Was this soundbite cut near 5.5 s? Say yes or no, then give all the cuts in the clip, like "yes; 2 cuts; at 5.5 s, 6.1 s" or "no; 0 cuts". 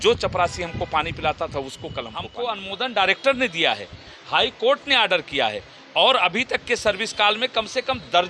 no; 1 cut; at 2.3 s